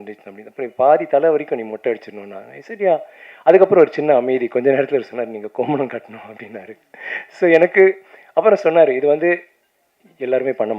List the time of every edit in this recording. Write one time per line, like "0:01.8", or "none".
none